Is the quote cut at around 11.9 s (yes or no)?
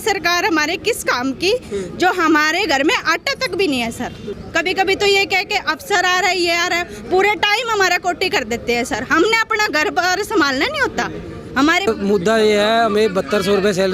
yes